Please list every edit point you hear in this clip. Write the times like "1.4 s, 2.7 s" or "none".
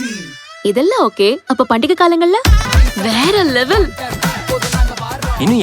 2.7 s